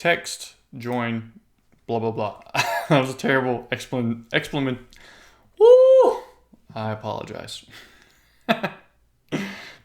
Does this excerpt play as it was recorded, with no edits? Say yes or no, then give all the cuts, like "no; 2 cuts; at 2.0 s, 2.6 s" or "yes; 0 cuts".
yes; 0 cuts